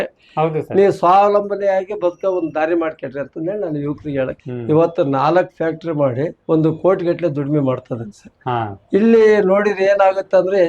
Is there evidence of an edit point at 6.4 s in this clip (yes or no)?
yes